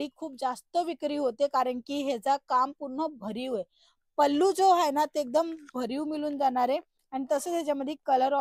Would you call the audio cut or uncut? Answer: uncut